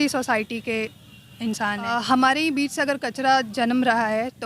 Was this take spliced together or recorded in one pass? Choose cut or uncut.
cut